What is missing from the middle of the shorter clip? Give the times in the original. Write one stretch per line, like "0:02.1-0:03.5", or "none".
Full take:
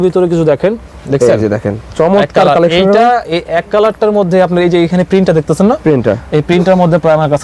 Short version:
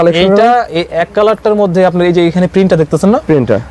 none